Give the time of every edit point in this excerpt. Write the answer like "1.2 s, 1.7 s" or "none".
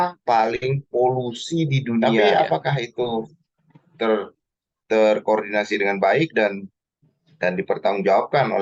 2.2 s